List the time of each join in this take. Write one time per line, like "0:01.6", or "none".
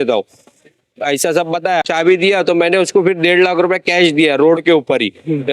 0:01.9